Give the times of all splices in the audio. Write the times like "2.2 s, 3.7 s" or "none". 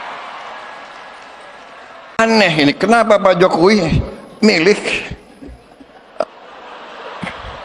2.2 s